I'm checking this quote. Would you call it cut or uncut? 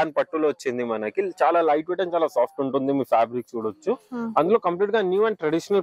uncut